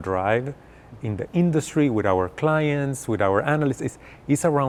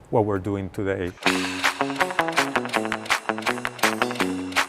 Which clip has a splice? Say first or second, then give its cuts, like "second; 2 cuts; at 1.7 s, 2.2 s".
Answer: second; 1 cut; at 1.1 s